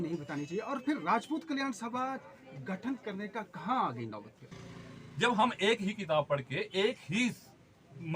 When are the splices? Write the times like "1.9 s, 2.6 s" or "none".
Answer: 4.7 s

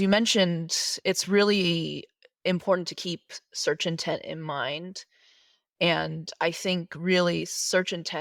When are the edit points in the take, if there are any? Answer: none

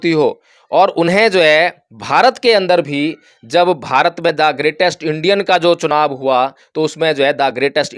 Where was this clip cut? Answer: none

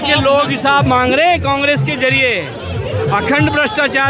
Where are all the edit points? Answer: none

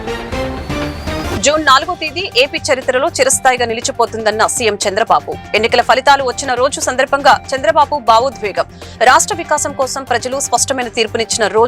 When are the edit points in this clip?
1.3 s

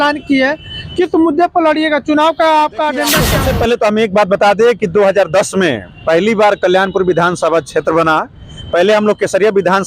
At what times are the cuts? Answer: 3.3 s

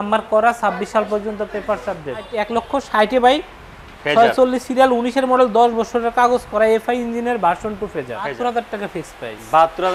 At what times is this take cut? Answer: 2.4 s, 8.3 s

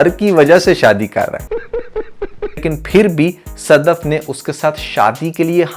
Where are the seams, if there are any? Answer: 2.6 s

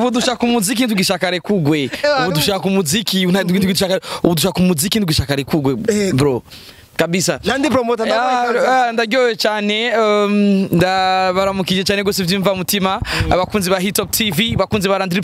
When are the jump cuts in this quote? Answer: none

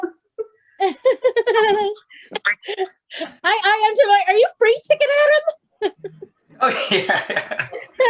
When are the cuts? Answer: none

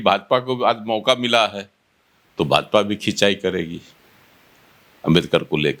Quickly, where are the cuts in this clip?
none

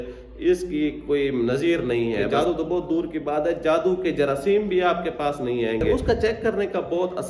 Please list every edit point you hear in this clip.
2.3 s, 6.0 s

